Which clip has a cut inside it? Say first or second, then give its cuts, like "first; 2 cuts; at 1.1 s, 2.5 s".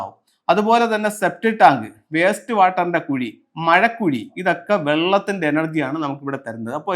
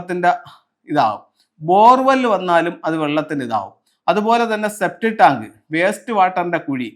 first; 1 cut; at 4.3 s